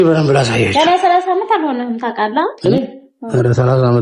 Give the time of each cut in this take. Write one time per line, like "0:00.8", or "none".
0:02.6